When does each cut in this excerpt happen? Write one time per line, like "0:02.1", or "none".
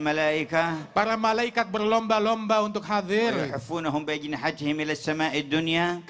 none

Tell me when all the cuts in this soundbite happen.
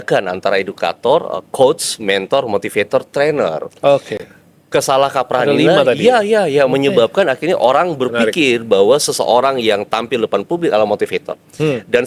none

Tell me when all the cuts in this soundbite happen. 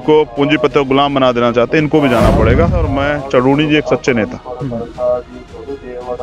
0:02.9

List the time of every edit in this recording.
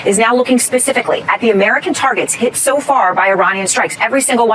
none

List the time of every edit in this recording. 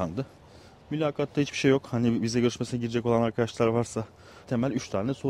0:04.4

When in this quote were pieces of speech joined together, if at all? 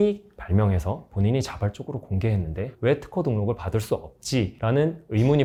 none

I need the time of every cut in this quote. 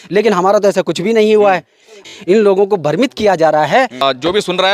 0:02.0
0:04.0

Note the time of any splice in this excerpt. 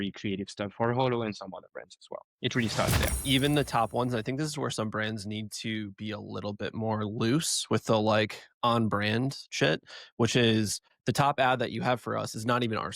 0:03.1

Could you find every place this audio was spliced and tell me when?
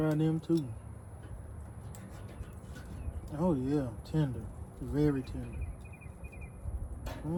none

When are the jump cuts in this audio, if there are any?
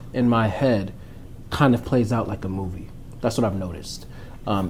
none

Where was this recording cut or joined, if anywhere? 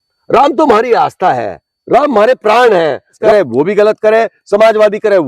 0:03.2

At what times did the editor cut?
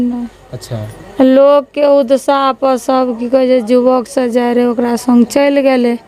none

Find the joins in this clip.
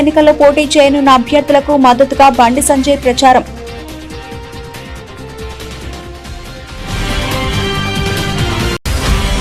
none

